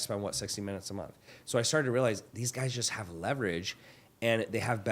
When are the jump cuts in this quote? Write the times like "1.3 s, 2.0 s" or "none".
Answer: none